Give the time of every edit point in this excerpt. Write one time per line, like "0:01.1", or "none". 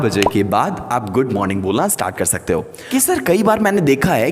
0:02.8